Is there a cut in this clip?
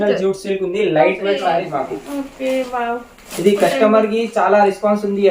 yes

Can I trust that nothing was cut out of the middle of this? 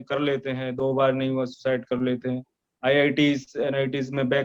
yes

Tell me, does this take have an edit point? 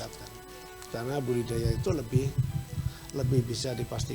no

